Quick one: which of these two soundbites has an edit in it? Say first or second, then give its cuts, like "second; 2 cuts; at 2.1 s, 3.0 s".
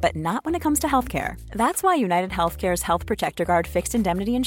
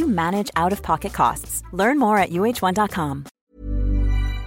second; 1 cut; at 3.3 s